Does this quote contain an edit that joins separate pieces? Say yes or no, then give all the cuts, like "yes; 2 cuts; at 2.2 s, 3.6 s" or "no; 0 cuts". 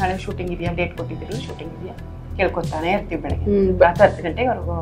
no; 0 cuts